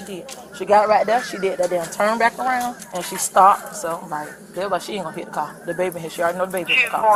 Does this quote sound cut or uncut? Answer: uncut